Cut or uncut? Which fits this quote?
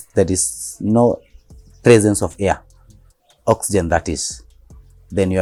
uncut